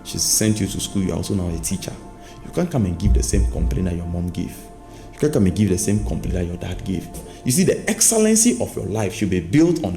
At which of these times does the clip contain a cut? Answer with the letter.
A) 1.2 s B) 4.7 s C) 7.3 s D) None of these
C